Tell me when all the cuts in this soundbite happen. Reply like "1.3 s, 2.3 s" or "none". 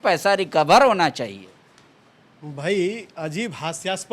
none